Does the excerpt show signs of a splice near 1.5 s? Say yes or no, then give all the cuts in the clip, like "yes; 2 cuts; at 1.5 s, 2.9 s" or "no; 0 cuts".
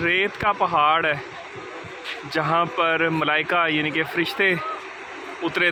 no; 0 cuts